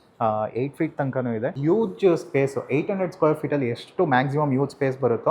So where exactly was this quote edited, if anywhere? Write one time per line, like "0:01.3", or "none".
0:01.6